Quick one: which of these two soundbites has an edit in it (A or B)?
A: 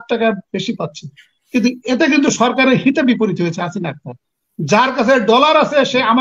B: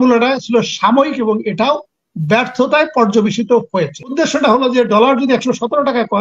B